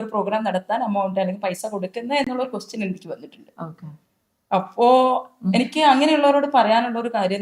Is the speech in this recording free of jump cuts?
yes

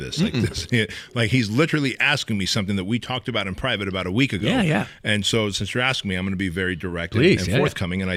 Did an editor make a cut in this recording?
no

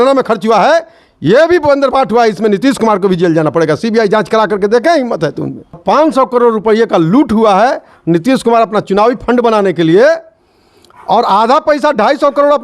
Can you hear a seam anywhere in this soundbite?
yes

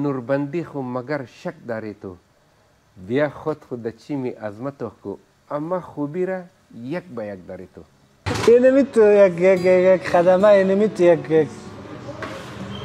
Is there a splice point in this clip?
yes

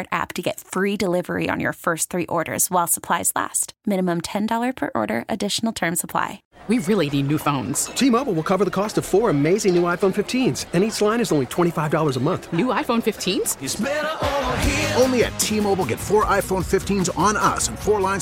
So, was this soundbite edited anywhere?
yes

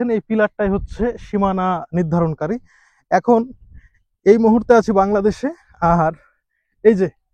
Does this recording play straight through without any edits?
yes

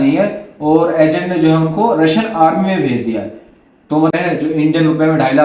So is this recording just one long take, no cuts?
no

